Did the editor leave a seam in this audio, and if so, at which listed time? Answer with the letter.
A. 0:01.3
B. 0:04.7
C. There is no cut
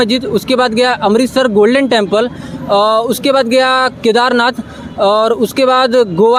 C